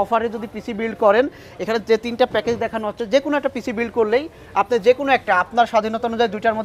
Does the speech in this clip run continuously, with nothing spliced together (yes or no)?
yes